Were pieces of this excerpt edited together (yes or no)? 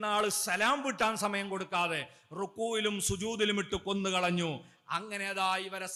no